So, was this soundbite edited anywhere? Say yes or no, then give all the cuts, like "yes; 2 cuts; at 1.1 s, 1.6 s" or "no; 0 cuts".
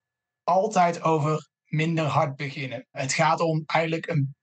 yes; 1 cut; at 3.1 s